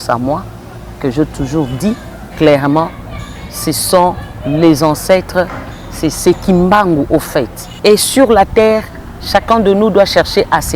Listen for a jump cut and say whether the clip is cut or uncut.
cut